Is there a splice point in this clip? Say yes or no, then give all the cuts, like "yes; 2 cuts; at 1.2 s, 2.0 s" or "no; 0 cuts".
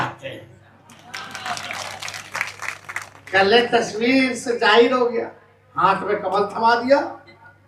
no; 0 cuts